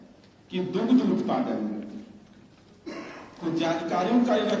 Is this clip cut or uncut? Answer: uncut